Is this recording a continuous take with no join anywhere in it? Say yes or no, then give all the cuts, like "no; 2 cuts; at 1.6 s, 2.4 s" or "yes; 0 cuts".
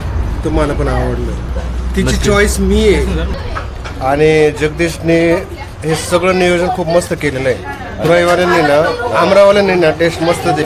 no; 3 cuts; at 1.5 s, 3.4 s, 8.0 s